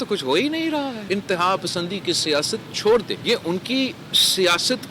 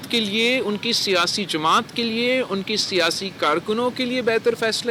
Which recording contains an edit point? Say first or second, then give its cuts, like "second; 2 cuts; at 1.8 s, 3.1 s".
first; 2 cuts; at 1.0 s, 3.1 s